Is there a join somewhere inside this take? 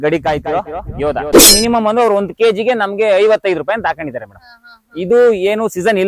yes; 1 cut; at 1.5 s

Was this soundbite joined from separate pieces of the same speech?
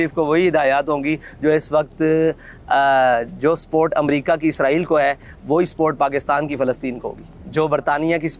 no; 0 cuts

